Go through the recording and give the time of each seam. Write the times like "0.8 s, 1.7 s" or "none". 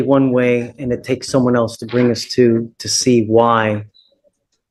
none